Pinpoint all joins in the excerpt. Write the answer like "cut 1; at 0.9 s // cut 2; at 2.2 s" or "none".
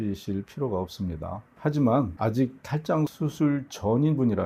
cut 1; at 1.4 s